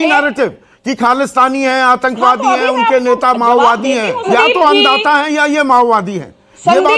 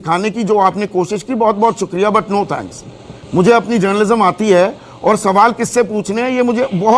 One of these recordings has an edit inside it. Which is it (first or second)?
first